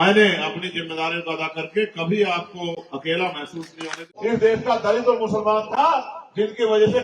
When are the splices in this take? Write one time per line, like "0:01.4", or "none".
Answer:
0:04.0